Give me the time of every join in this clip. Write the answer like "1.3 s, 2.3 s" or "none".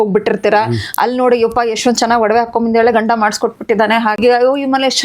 4.1 s